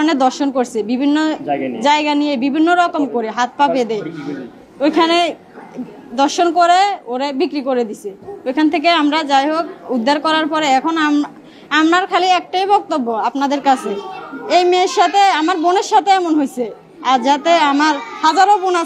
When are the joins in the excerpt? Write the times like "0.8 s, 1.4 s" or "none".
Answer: none